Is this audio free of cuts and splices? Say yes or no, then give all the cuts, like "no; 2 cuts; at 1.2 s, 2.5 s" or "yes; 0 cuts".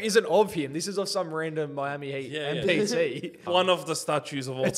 no; 1 cut; at 3.4 s